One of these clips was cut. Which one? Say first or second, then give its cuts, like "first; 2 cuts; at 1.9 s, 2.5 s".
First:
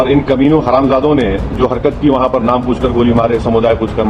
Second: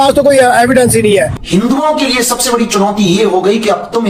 second; 1 cut; at 1.4 s